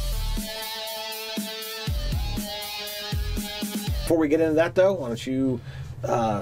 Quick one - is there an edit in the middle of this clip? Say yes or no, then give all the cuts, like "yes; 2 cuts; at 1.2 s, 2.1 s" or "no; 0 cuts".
no; 0 cuts